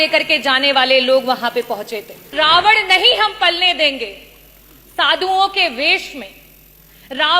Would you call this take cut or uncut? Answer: cut